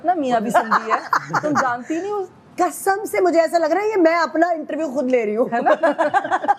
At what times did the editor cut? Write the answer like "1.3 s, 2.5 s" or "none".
none